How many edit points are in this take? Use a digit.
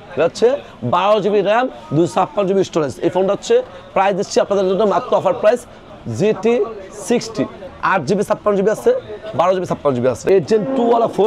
3